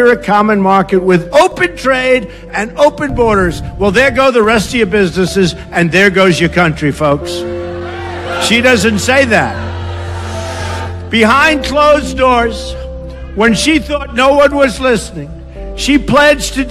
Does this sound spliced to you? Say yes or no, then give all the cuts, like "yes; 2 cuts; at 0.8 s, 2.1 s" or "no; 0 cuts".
yes; 1 cut; at 15.1 s